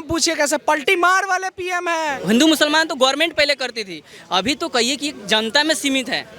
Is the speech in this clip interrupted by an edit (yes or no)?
yes